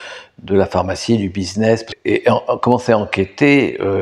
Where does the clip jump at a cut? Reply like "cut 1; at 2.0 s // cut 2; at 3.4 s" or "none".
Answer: cut 1; at 1.9 s